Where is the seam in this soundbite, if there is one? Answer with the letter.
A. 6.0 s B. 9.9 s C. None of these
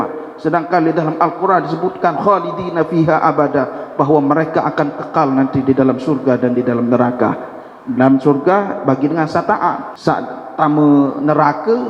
B